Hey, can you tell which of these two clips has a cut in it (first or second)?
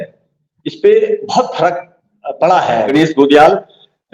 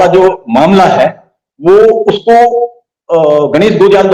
first